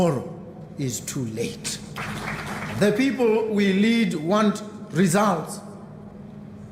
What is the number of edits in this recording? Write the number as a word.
one